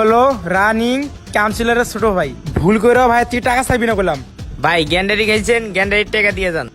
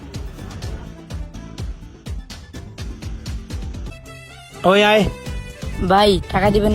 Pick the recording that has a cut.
second; 1 cut; at 3.9 s

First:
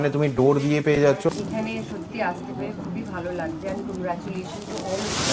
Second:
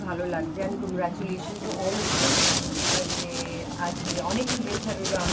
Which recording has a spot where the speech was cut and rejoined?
first; 1 cut; at 1.4 s

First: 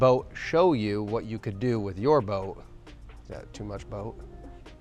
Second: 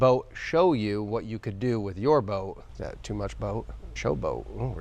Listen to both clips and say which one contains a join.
second; 2 cuts; at 2.7 s, 3.8 s

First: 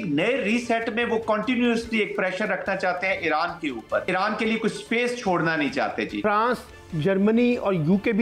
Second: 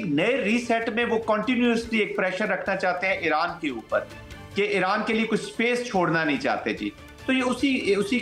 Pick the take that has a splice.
first; 2 cuts; at 4.1 s, 6.2 s

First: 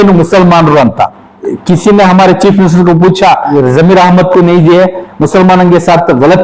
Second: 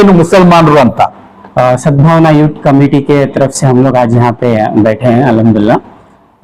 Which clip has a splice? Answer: first; 2 cuts; at 1.5 s, 3.5 s

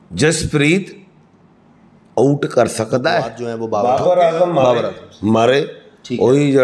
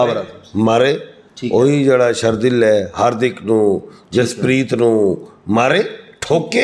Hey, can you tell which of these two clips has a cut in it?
first; 1 cut; at 3.6 s

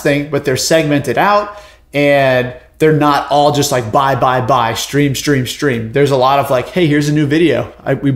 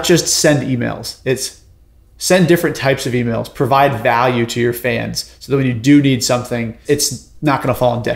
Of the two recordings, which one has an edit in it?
second; 1 cut; at 6.8 s

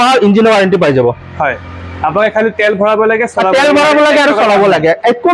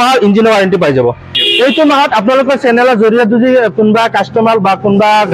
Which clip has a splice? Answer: second; 1 cut; at 1.3 s

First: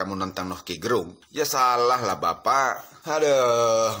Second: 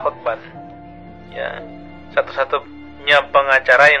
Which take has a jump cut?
first; 2 cuts; at 1.2 s, 2.9 s

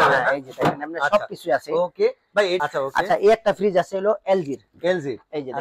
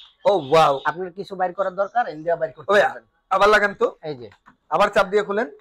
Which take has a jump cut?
first; 1 cut; at 2.6 s

